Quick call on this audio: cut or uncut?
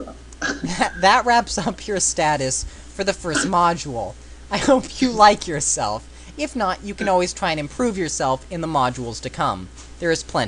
cut